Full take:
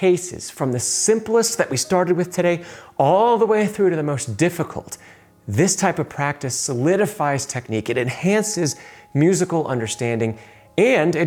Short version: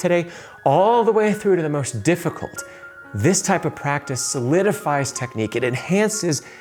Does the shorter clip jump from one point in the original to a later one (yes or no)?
no